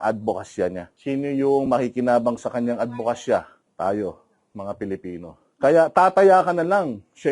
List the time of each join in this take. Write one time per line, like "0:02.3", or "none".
0:00.9
0:03.6
0:05.4